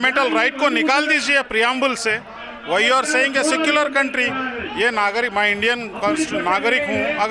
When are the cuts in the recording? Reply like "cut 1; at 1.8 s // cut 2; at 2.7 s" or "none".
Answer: none